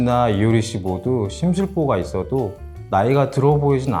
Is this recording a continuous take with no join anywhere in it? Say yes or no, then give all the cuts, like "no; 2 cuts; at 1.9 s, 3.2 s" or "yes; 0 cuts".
yes; 0 cuts